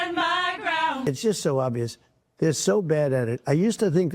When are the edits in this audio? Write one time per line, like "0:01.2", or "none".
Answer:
0:01.0